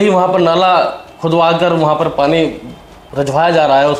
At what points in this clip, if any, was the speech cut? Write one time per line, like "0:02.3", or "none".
0:03.0